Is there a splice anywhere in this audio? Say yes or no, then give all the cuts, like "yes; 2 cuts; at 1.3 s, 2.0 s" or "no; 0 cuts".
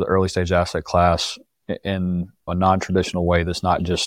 yes; 1 cut; at 2.5 s